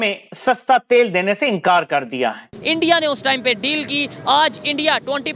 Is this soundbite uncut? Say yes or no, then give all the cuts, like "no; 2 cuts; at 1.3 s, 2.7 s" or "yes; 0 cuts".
no; 1 cut; at 2.5 s